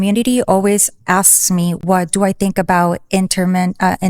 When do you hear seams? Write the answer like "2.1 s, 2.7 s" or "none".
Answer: none